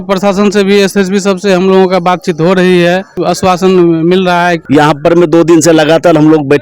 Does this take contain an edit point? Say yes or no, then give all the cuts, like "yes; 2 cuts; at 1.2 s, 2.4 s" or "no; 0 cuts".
yes; 2 cuts; at 3.2 s, 4.6 s